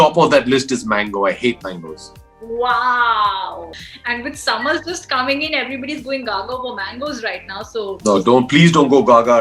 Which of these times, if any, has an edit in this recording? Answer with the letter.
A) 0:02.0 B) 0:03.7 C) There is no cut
B